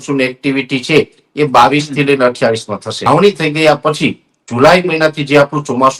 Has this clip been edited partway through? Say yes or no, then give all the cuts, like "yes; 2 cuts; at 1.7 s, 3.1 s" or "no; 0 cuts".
yes; 1 cut; at 3.1 s